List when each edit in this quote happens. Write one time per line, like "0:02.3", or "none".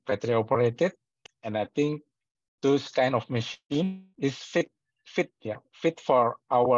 0:04.1